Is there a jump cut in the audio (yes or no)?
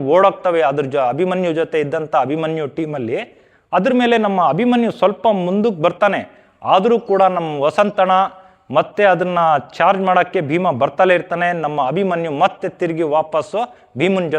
no